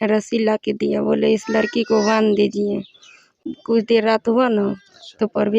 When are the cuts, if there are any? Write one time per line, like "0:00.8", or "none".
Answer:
0:03.4